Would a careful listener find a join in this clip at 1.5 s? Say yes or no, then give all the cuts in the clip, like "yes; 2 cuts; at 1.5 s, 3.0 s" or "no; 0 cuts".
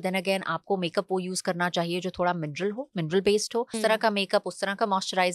no; 1 cut; at 3.7 s